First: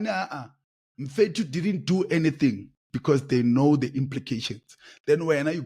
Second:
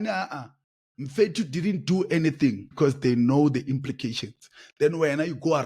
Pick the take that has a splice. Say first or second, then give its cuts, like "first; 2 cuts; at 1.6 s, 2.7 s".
second; 1 cut; at 2.7 s